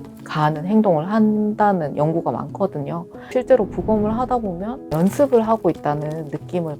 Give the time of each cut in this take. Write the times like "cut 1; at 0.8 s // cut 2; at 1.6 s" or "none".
cut 1; at 3.3 s // cut 2; at 4.9 s